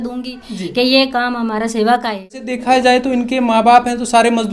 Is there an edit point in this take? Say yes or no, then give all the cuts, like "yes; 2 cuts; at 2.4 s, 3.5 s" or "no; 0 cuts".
yes; 1 cut; at 2.5 s